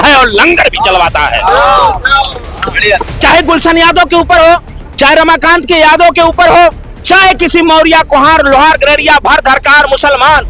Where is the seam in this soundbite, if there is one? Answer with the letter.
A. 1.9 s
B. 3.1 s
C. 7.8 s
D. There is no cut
B